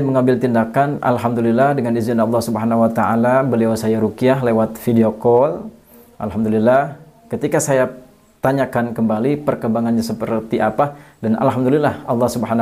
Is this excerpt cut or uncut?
uncut